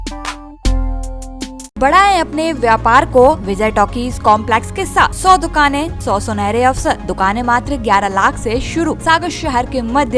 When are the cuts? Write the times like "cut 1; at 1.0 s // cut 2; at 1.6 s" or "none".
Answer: cut 1; at 1.8 s // cut 2; at 3.5 s // cut 3; at 5.2 s // cut 4; at 5.9 s // cut 5; at 7.1 s // cut 6; at 9.0 s